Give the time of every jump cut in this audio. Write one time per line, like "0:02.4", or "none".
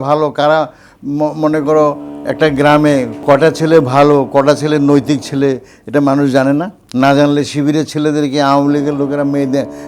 0:03.1
0:06.8